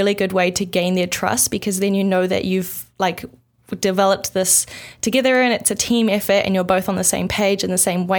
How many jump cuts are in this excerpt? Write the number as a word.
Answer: zero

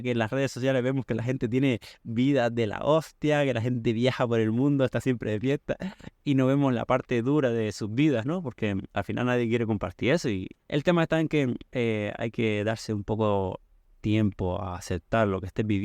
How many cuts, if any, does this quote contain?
two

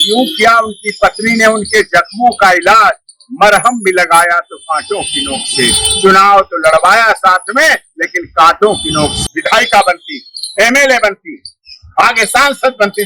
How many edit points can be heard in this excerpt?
one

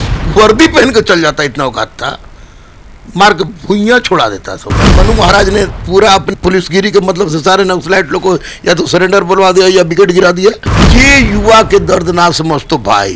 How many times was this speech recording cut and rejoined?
two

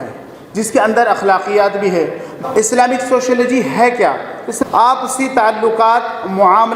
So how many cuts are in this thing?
two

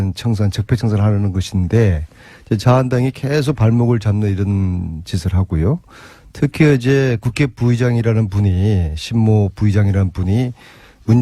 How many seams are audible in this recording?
zero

